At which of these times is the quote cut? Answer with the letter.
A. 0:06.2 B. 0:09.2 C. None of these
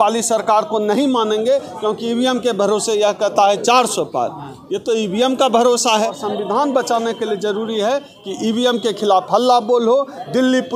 A